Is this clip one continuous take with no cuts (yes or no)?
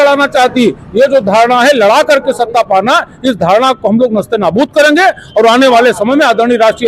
yes